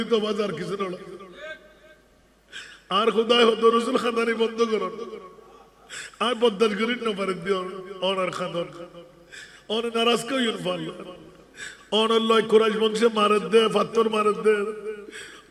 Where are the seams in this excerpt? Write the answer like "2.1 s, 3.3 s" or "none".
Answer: none